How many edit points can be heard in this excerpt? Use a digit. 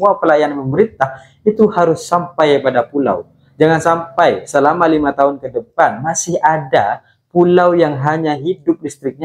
0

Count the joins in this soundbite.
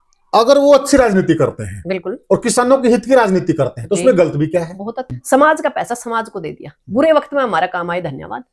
1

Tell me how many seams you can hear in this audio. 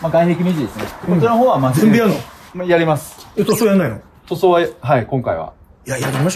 0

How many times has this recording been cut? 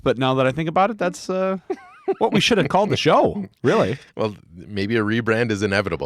0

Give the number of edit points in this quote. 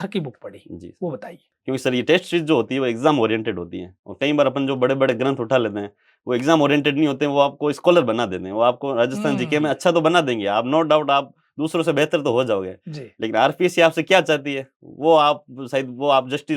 1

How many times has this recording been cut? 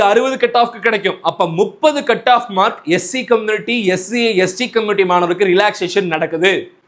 0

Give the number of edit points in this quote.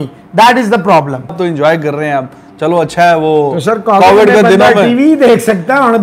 1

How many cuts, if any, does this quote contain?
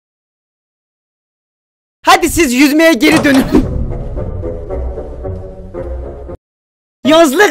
1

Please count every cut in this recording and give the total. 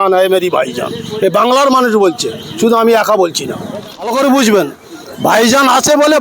1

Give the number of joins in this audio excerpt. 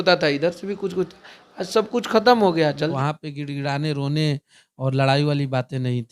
1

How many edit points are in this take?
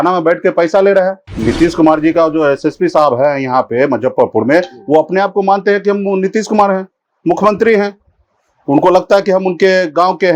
1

